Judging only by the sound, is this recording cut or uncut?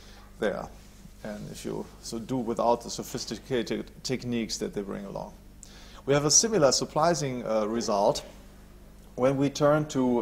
uncut